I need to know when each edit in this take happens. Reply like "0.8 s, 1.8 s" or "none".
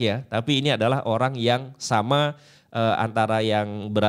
none